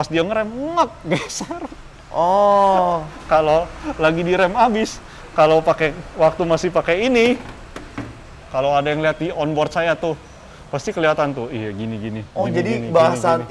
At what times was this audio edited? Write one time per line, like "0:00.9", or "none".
none